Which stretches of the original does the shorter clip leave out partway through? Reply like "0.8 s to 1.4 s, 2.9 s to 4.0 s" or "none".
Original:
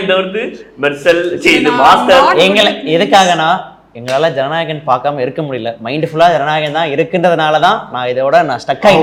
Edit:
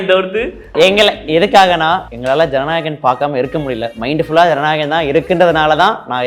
0.8 s to 2.3 s, 3.7 s to 3.9 s